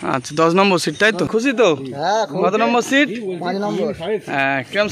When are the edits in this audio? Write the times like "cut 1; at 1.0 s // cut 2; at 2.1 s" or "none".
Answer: cut 1; at 1.3 s